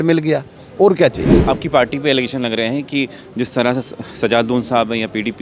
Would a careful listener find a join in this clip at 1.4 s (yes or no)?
yes